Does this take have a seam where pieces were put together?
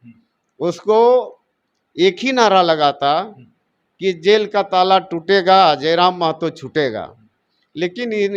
no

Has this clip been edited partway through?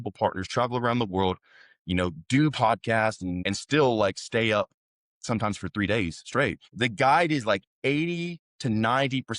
yes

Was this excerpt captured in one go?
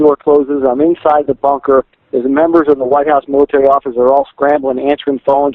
yes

